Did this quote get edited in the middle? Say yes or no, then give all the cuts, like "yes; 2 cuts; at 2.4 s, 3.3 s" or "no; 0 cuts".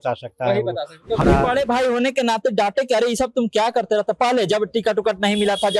yes; 1 cut; at 1.2 s